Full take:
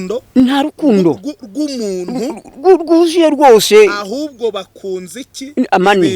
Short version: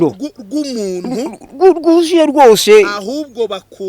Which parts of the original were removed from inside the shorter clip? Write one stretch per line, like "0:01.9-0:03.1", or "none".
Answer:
none